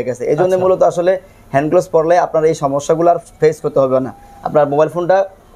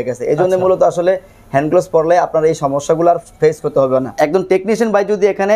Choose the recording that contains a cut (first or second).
second